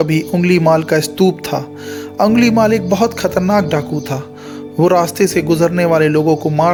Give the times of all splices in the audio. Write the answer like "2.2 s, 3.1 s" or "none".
none